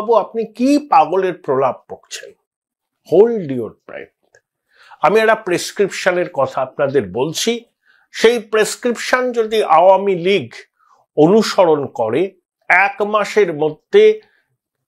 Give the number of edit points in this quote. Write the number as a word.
zero